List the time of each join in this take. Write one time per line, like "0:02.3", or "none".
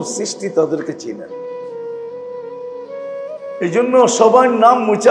0:01.4
0:03.3